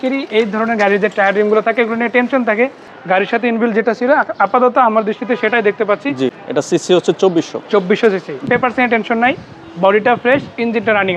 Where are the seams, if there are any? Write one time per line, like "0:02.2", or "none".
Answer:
0:02.9
0:06.4
0:08.5

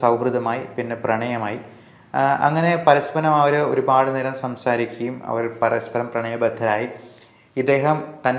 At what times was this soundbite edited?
none

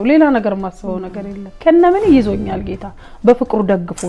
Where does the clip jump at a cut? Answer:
0:01.6

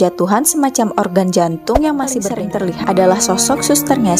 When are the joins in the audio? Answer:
0:02.3

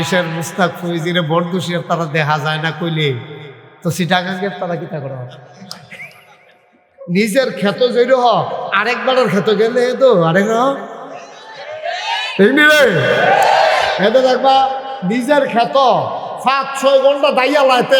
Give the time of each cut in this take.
0:07.0

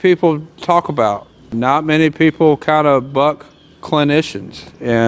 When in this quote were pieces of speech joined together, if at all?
0:01.5

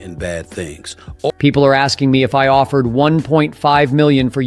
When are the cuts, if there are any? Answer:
0:01.3

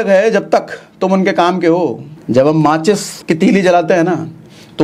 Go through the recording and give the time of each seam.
0:02.1
0:03.1

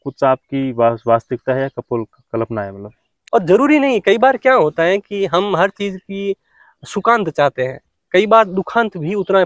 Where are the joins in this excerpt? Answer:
0:03.1

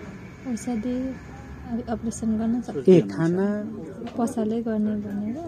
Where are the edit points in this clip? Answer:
0:03.6

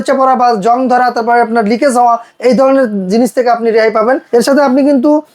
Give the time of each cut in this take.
0:04.2

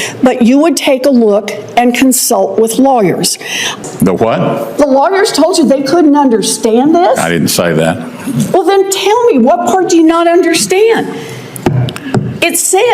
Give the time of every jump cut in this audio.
0:03.8

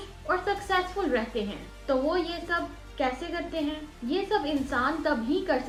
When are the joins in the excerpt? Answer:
none

